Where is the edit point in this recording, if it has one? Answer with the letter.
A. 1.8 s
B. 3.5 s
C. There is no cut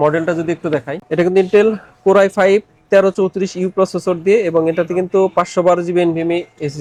C